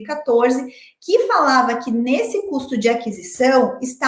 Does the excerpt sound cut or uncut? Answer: uncut